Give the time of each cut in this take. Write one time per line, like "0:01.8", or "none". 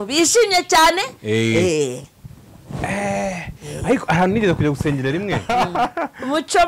0:05.4